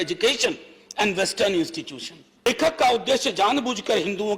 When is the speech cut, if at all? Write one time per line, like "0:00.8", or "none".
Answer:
0:02.5

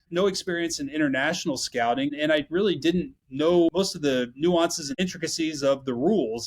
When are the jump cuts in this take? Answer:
0:02.1
0:03.7
0:04.9

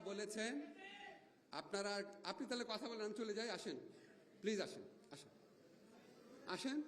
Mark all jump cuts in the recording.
none

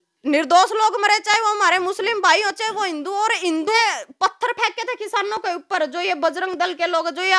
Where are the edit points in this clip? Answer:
0:03.8

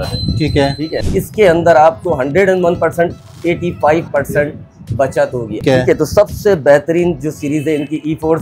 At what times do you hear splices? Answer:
0:01.1
0:05.6

